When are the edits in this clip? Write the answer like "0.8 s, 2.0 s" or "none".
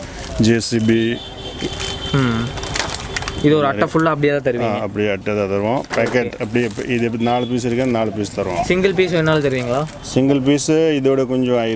none